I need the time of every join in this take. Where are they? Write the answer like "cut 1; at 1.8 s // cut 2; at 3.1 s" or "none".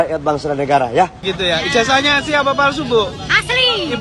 cut 1; at 1.2 s